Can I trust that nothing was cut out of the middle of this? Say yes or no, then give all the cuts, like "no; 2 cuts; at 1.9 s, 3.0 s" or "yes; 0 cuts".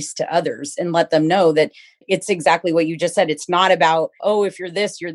no; 2 cuts; at 2.0 s, 4.2 s